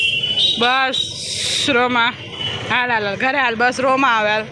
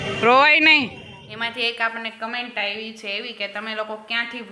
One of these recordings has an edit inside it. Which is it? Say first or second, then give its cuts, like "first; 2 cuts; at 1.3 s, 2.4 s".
second; 1 cut; at 1.0 s